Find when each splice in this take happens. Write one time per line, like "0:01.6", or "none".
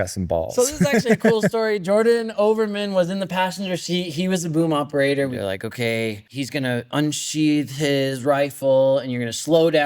0:05.4
0:06.2